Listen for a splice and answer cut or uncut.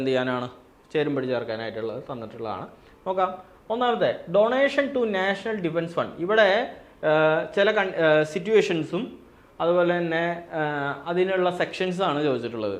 uncut